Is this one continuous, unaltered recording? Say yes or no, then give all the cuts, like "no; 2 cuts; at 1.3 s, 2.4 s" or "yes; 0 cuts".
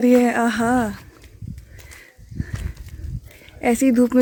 yes; 0 cuts